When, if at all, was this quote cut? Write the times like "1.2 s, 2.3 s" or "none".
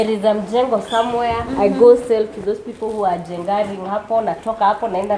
none